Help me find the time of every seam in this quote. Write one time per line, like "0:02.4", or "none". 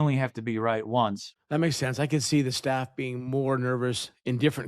0:01.3